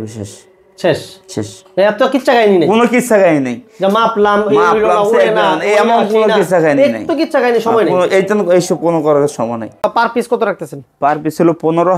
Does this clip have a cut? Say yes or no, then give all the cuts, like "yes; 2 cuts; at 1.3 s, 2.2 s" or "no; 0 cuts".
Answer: yes; 1 cut; at 9.8 s